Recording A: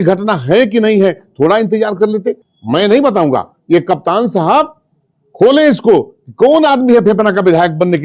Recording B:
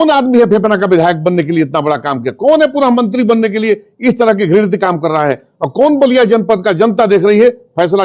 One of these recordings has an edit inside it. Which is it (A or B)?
A